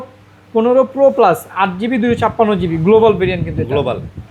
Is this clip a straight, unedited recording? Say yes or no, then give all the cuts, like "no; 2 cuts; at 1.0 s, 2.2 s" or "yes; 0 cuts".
yes; 0 cuts